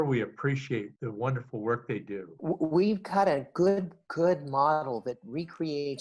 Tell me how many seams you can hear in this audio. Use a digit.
2